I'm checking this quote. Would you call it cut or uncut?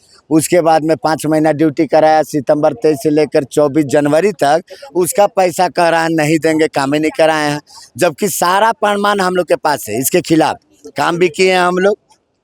uncut